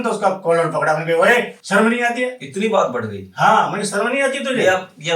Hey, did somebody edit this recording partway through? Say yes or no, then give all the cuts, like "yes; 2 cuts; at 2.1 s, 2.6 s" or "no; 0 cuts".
yes; 1 cut; at 1.6 s